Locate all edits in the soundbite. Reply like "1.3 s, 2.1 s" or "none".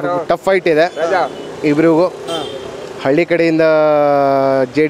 none